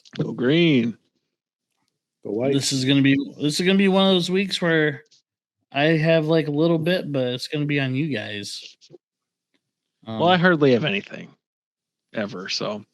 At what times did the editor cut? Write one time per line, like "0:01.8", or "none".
none